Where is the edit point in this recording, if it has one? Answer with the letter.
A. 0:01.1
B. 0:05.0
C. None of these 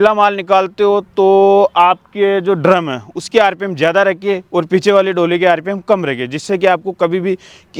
C